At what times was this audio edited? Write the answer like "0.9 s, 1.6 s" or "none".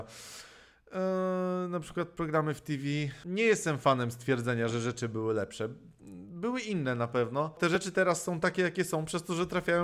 7.8 s